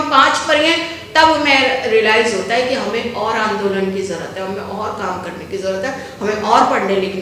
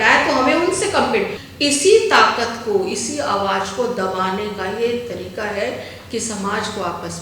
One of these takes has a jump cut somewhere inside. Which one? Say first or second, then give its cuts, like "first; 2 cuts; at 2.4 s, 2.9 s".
second; 1 cut; at 1.4 s